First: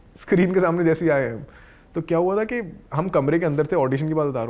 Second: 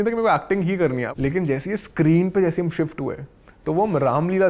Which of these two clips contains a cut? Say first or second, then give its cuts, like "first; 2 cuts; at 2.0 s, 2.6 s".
second; 1 cut; at 1.1 s